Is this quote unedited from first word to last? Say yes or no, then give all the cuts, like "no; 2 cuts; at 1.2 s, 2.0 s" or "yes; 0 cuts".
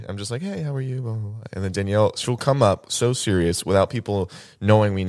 yes; 0 cuts